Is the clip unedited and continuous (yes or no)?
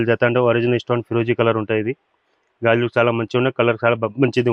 yes